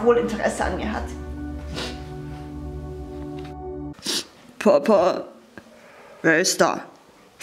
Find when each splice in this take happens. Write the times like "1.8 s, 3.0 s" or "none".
3.9 s